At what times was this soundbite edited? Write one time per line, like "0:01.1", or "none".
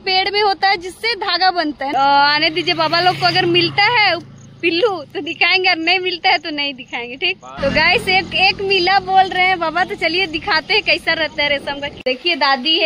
0:01.9
0:11.9